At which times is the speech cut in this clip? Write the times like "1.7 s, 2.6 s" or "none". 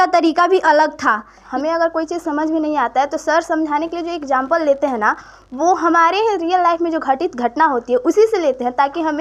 1.4 s

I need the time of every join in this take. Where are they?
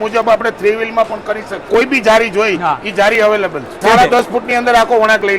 1.7 s, 3.8 s

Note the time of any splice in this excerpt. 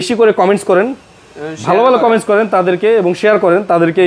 none

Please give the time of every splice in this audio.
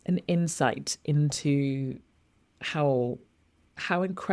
none

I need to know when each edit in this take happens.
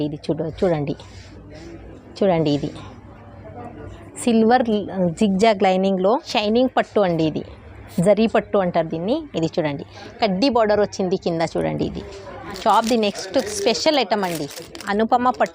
6.3 s, 12.6 s

